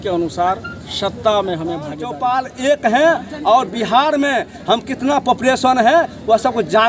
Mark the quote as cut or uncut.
cut